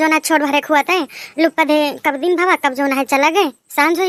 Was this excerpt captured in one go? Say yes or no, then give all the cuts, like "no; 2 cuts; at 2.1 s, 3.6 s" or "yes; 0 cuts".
yes; 0 cuts